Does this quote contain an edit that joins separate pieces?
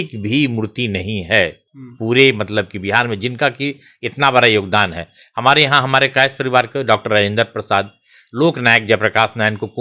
no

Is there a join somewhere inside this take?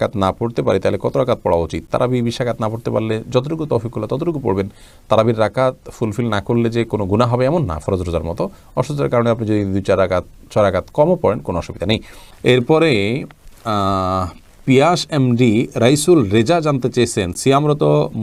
no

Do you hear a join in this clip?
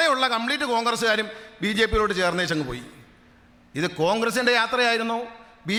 no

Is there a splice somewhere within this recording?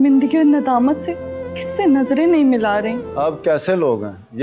yes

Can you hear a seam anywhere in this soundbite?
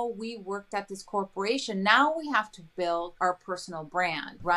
no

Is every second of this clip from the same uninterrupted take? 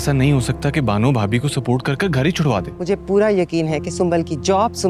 no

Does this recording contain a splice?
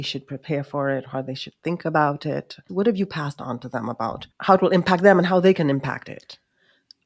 yes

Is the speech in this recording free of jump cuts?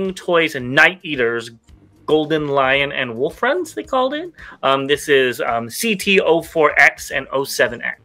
yes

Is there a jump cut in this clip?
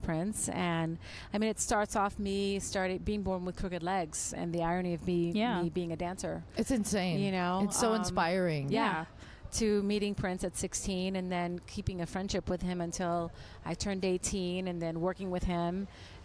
no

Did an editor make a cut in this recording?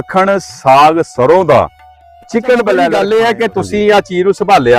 yes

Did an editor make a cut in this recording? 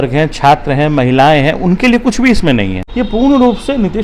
yes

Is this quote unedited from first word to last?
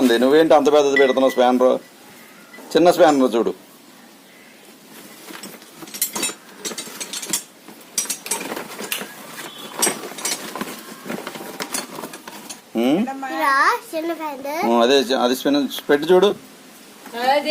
yes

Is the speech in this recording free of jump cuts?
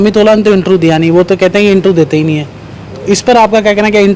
yes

